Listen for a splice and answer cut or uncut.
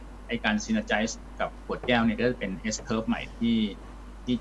cut